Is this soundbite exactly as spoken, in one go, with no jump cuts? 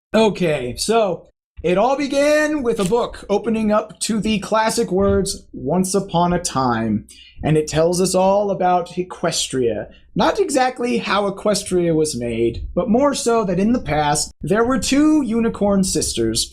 no; 1 cut; at 10.9 s

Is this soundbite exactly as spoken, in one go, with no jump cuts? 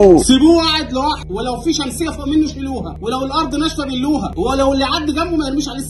no; 3 cuts; at 1.2 s, 2.9 s, 4.3 s

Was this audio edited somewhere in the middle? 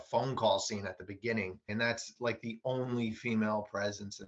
yes; 1 cut; at 1.7 s

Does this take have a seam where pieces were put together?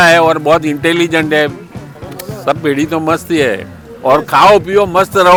no; 0 cuts

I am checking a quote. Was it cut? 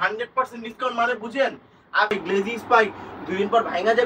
yes; 1 cut; at 2.1 s

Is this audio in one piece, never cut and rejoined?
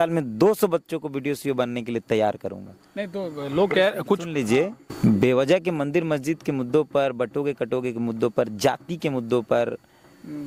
yes; 0 cuts

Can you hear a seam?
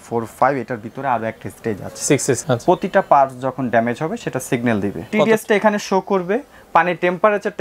yes; 2 cuts; at 2.4 s, 5.1 s

